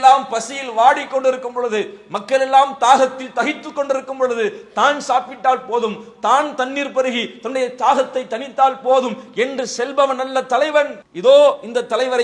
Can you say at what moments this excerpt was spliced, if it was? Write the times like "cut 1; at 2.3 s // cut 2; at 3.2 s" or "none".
cut 1; at 11.0 s

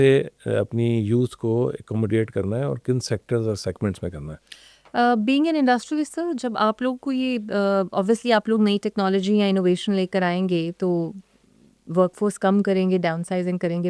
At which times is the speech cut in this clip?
none

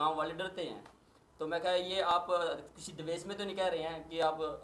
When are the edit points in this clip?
none

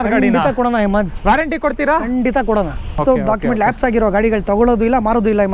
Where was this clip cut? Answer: cut 1; at 3.0 s

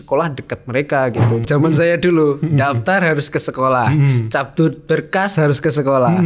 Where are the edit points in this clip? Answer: cut 1; at 1.4 s

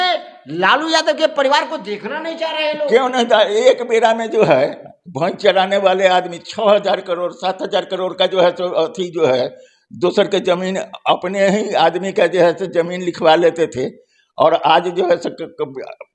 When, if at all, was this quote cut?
none

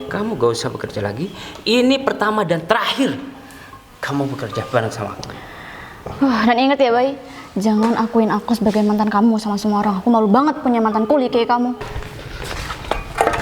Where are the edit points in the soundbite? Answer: cut 1; at 11.9 s

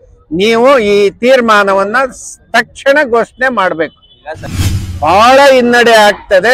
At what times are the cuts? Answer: cut 1; at 4.5 s

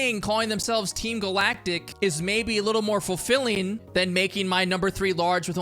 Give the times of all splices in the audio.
cut 1; at 1.9 s // cut 2; at 3.8 s

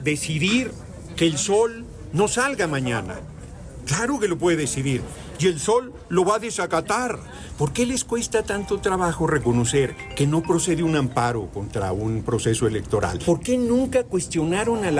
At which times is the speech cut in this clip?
cut 1; at 7.4 s // cut 2; at 13.2 s

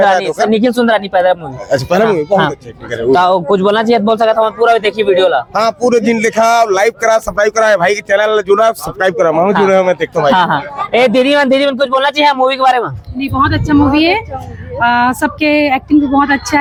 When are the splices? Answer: none

